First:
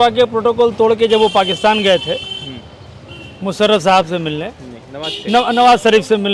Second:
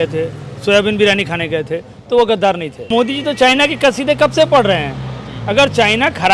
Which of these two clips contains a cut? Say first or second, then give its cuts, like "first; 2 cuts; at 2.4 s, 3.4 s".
second; 1 cut; at 2.9 s